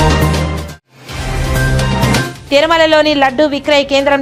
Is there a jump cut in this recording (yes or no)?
no